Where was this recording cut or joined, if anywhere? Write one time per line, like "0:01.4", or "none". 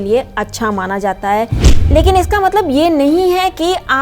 0:01.8